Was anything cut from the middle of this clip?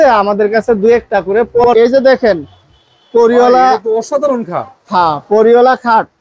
yes; 1 cut; at 1.7 s

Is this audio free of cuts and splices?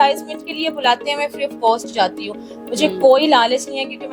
yes; 0 cuts

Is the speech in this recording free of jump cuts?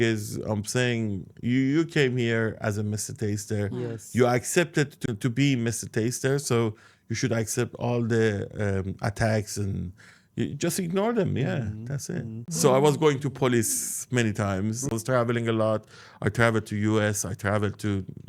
no; 3 cuts; at 5.0 s, 12.5 s, 14.9 s

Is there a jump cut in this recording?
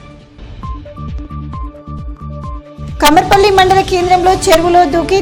yes; 1 cut; at 2.5 s

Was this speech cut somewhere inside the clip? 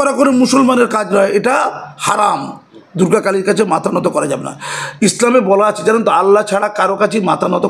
no; 0 cuts

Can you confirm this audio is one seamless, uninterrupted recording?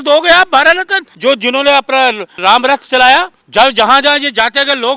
no; 3 cuts; at 1.0 s, 2.4 s, 3.4 s

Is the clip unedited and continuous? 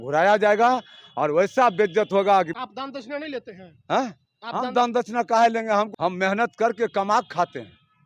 no; 2 cuts; at 2.6 s, 5.9 s

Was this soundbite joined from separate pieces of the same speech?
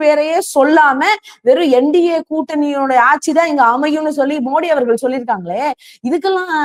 no; 0 cuts

